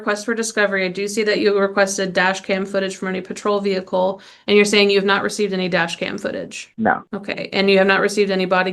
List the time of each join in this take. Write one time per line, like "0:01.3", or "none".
0:07.1